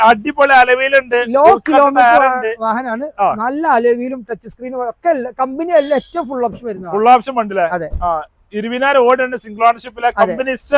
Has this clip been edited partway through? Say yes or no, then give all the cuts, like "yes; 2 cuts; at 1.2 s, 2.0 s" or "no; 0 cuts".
no; 0 cuts